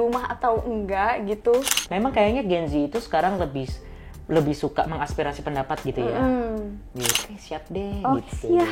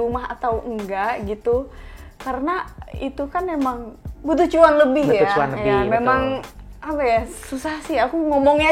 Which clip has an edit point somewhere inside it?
first; 2 cuts; at 1.8 s, 7.3 s

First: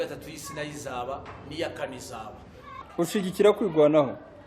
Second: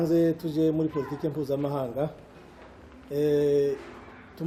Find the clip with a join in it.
first; 1 cut; at 2.7 s

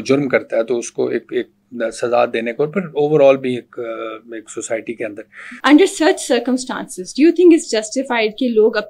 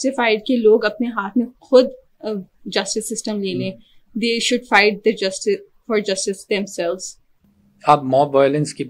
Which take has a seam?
first; 1 cut; at 5.5 s

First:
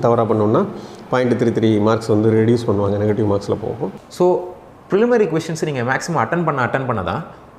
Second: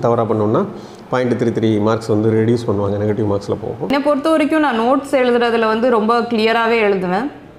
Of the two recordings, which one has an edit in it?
first; 1 cut; at 3.8 s

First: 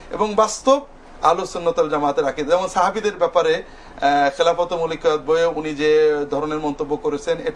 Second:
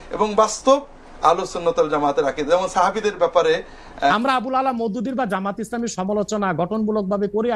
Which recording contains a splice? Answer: second; 1 cut; at 4.1 s

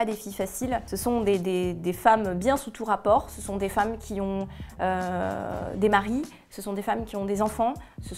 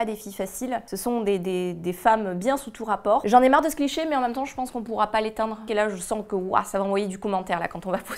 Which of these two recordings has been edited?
second; 2 cuts; at 3.2 s, 5.6 s

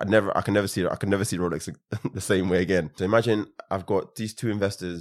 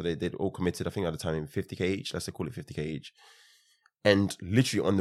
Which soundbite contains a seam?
first; 1 cut; at 2.9 s

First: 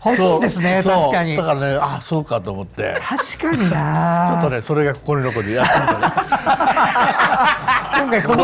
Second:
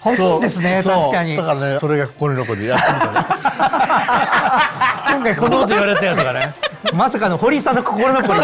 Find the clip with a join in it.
second; 1 cut; at 1.8 s

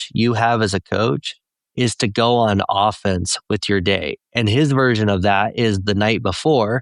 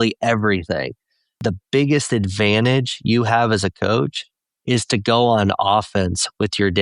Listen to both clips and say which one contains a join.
second; 1 cut; at 1.4 s

